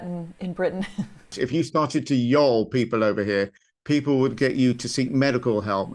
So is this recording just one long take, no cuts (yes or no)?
no